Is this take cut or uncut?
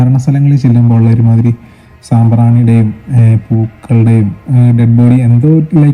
uncut